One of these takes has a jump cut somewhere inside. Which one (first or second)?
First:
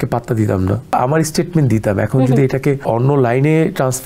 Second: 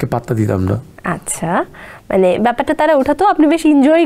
first